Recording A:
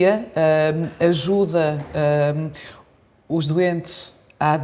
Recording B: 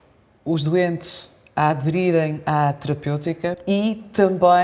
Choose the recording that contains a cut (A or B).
B